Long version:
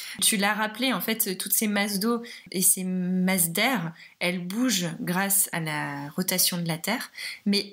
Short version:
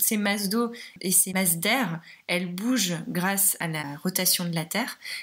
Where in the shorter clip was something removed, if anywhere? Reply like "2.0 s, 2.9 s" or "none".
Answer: 1.3 s, 3.8 s